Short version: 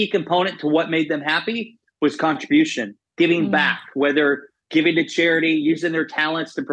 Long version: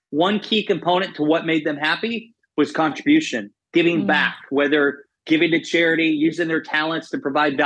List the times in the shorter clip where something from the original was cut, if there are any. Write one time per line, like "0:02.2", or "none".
none